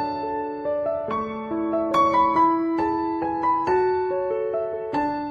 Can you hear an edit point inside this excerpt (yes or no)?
no